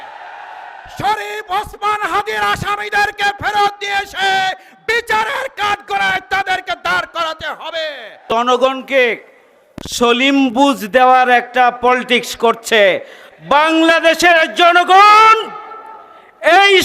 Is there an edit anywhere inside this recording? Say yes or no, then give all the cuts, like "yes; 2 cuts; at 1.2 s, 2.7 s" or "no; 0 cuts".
yes; 1 cut; at 8.2 s